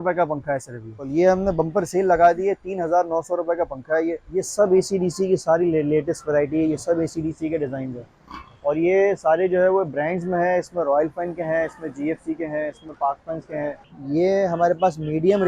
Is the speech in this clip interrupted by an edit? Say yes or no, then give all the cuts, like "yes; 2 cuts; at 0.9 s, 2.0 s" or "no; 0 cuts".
yes; 3 cuts; at 1.1 s, 4.2 s, 13.9 s